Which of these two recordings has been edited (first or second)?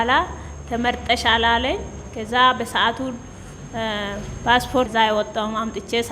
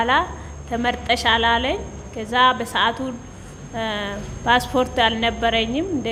first